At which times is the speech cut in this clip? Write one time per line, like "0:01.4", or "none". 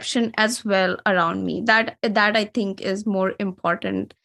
none